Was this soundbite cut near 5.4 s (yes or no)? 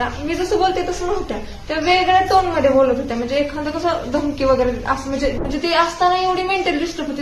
yes